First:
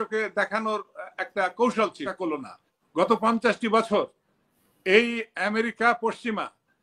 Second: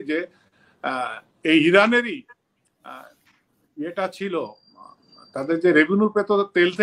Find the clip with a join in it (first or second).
first